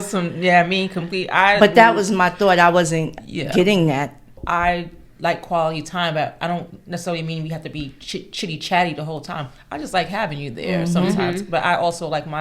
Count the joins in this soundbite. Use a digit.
1